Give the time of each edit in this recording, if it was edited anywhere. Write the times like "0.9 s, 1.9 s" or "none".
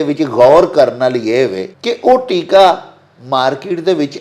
1.7 s

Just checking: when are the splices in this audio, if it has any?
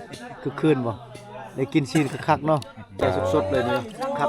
3.0 s

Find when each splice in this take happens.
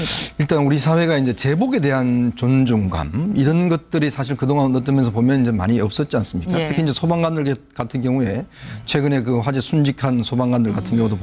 2.6 s

